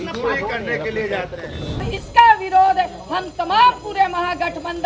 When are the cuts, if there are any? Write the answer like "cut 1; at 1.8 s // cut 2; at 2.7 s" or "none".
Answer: cut 1; at 2.0 s